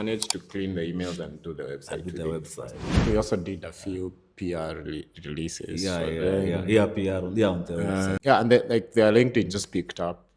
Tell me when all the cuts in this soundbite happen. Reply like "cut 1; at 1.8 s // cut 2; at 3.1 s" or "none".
cut 1; at 3.1 s // cut 2; at 8.2 s